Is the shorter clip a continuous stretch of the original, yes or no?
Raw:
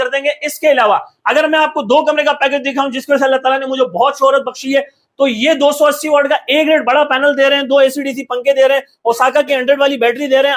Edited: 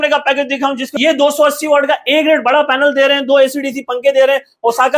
no